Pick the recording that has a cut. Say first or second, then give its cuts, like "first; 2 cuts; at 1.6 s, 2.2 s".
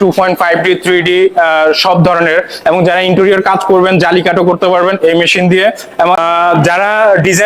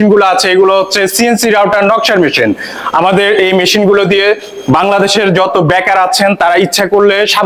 first; 1 cut; at 6.2 s